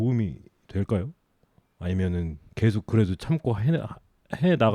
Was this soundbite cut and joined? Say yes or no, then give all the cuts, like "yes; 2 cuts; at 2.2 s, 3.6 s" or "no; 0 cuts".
yes; 1 cut; at 2.4 s